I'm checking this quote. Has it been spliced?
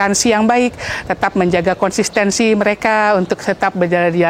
no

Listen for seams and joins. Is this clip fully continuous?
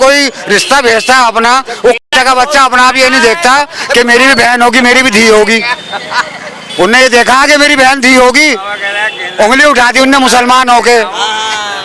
yes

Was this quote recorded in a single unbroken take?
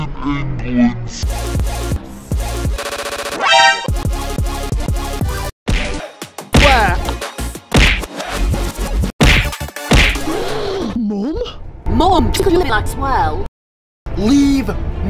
no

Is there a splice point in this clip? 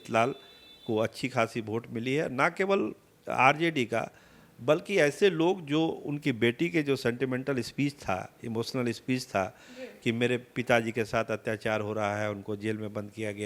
no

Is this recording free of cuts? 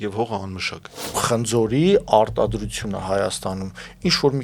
no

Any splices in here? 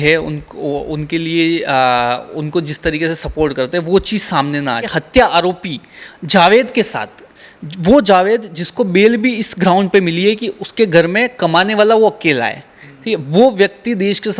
yes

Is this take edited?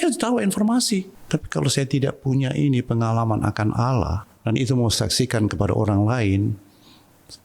yes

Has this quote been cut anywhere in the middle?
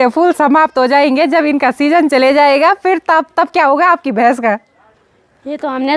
no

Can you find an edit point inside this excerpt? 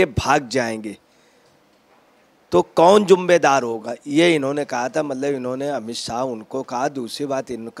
no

